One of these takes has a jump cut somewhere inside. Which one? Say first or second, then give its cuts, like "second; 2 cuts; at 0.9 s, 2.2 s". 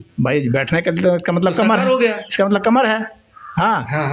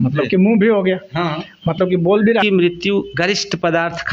second; 1 cut; at 2.4 s